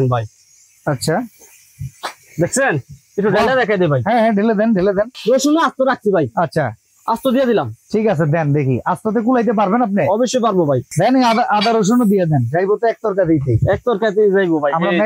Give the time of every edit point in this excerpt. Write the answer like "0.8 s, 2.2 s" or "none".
5.1 s, 10.9 s

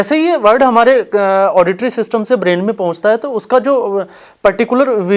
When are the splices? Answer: none

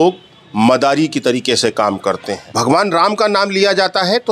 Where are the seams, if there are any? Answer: 2.4 s

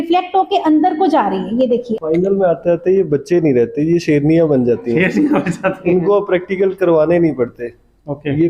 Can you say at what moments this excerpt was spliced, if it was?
1.9 s

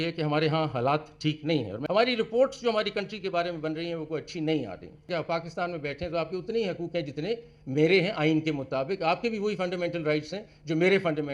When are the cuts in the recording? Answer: 1.8 s, 5.1 s

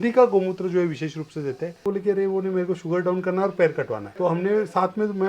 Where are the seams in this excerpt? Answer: 1.8 s, 4.0 s

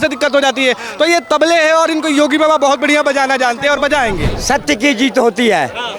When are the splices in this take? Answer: 4.3 s

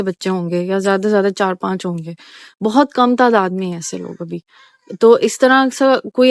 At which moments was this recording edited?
none

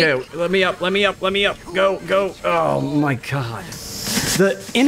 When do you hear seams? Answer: none

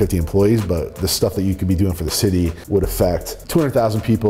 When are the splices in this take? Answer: 2.6 s, 3.3 s

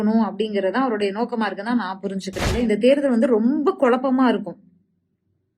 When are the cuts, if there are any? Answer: 2.6 s

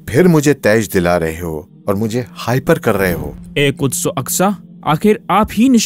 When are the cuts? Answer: 3.3 s

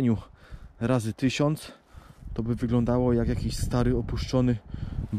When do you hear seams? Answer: none

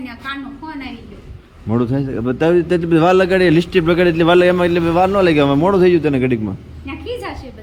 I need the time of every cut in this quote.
none

